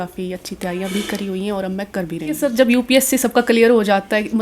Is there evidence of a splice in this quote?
yes; 1 cut; at 2.4 s

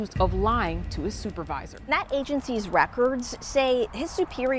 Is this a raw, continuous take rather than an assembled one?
no; 1 cut; at 1.7 s

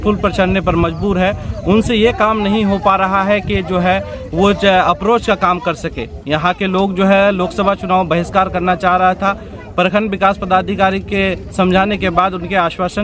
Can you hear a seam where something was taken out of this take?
no; 0 cuts

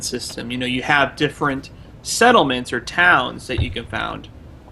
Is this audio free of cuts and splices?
no; 1 cut; at 2.6 s

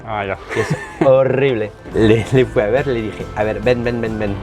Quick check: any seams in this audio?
yes; 1 cut; at 1.8 s

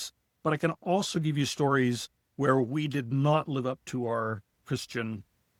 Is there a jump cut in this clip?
no; 0 cuts

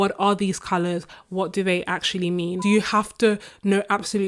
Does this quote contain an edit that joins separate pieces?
yes; 1 cut; at 2.6 s

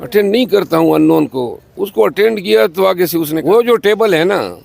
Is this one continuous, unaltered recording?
no; 1 cut; at 3.4 s

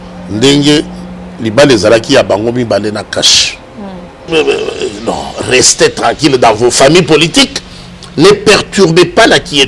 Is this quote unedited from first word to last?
no; 1 cut; at 4.3 s

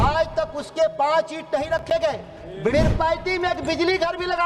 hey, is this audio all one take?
no; 1 cut; at 2.7 s

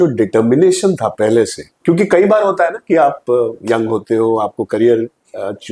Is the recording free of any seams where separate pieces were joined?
no; 2 cuts; at 1.7 s, 3.6 s

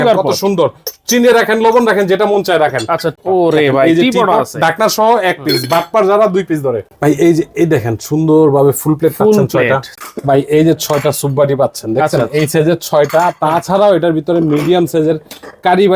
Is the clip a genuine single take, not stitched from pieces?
no; 2 cuts; at 3.1 s, 10.0 s

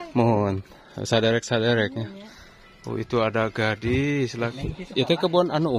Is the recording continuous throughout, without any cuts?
no; 1 cut; at 4.5 s

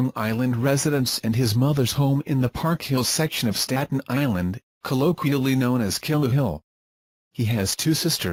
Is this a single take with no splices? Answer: yes; 0 cuts

